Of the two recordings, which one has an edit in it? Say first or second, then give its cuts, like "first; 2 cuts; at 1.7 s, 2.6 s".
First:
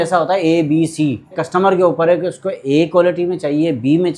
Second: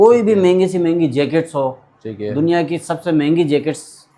first; 1 cut; at 1.4 s